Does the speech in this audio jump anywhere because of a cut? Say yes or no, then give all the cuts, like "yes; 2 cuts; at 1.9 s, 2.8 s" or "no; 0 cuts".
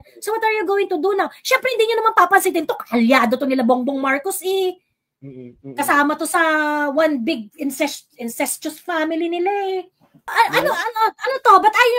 yes; 1 cut; at 10.3 s